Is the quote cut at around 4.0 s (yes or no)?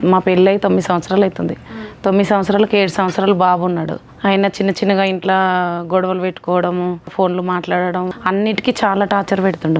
yes